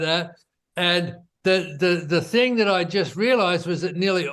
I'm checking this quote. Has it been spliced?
yes; 1 cut; at 1.2 s

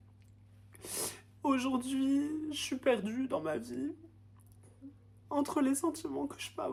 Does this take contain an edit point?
no; 0 cuts

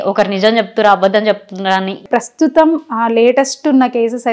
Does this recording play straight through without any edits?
no; 1 cut; at 2.0 s

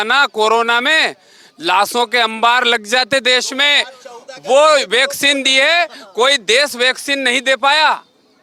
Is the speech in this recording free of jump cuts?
yes; 0 cuts

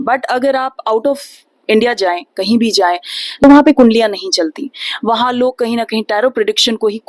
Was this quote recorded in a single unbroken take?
no; 1 cut; at 3.4 s

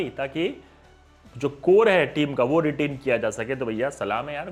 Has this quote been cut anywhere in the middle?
no; 0 cuts

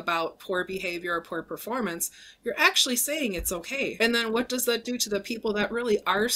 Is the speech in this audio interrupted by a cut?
yes; 1 cut; at 3.9 s

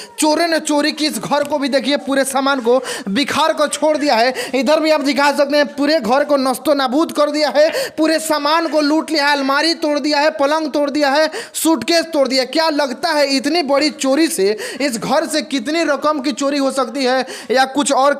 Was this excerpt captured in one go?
yes; 0 cuts

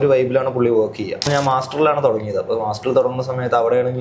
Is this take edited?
yes; 1 cut; at 1.3 s

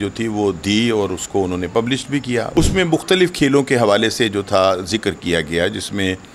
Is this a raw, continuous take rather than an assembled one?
no; 1 cut; at 2.5 s

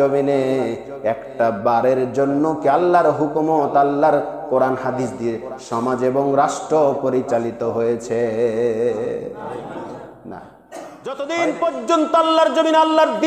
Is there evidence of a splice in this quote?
yes; 1 cut; at 11.1 s

